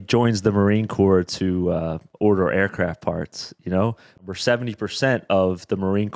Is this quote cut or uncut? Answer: cut